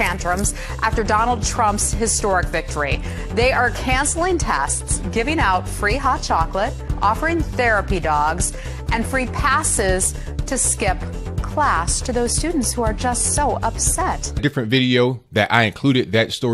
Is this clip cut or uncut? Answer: uncut